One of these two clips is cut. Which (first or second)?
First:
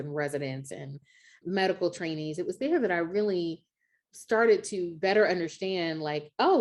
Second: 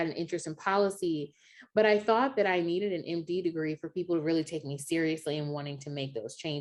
first